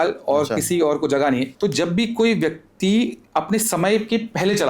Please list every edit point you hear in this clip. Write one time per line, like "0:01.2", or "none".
0:01.5